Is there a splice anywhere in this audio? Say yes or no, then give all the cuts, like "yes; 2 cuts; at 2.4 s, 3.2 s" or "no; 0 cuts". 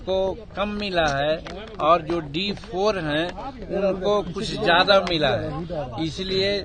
no; 0 cuts